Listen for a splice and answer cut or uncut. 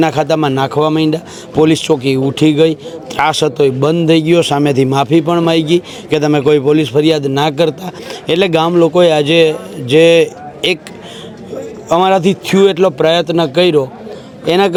uncut